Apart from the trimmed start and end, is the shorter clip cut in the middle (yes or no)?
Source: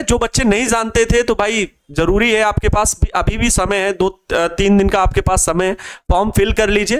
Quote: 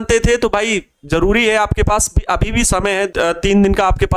yes